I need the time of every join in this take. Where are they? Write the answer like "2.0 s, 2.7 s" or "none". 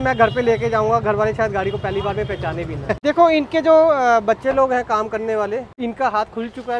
3.0 s, 5.7 s